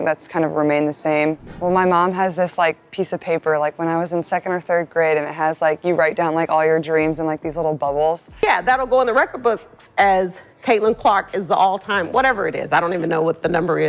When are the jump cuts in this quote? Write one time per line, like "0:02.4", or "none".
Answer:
0:01.5
0:08.3